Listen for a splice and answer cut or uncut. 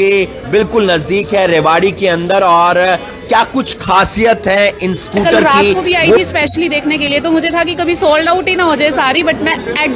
cut